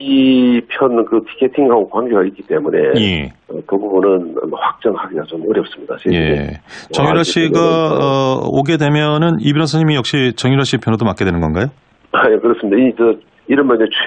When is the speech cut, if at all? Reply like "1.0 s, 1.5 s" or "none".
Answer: 7.6 s